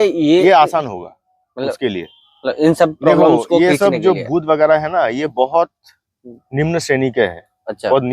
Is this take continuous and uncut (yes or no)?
yes